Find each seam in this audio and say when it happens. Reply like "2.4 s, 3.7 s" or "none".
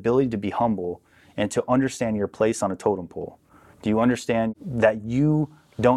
4.5 s